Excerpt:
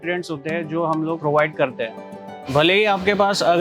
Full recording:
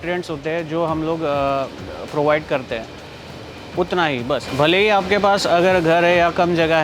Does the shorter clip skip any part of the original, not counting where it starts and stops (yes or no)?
yes